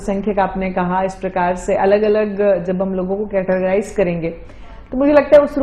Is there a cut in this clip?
no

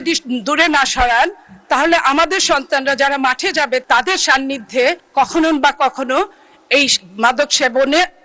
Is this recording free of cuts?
yes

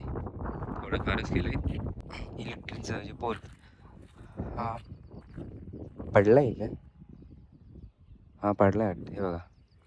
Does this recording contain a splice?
yes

